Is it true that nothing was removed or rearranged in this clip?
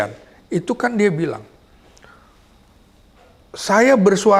yes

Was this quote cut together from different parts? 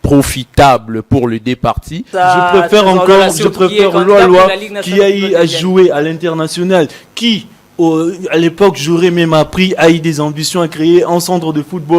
yes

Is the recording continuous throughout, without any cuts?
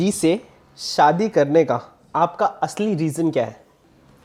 yes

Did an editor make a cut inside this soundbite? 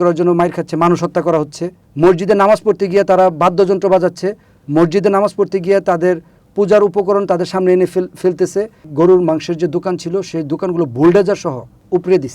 yes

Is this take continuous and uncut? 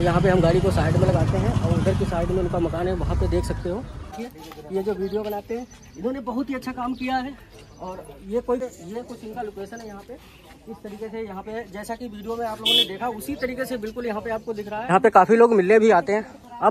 no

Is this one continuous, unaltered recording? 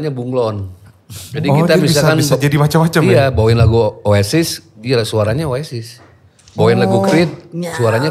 yes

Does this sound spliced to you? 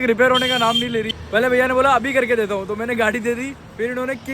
no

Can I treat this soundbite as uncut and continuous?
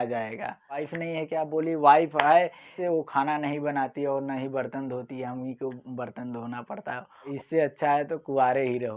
no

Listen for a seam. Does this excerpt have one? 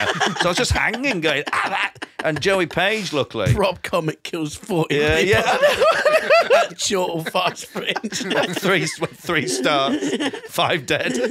no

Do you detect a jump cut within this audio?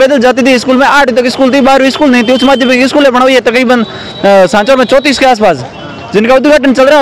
no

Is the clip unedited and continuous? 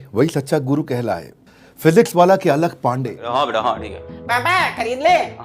no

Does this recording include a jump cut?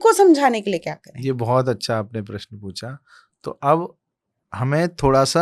no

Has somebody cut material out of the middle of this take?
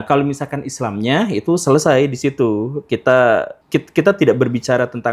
yes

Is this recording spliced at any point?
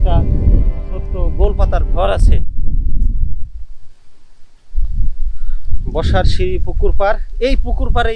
no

